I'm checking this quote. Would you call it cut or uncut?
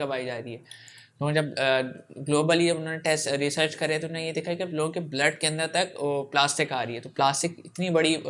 uncut